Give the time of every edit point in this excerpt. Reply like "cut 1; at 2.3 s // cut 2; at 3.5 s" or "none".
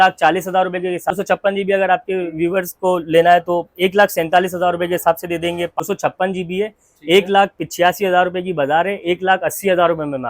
cut 1; at 1.1 s // cut 2; at 5.8 s